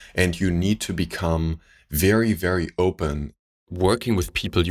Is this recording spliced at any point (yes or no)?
yes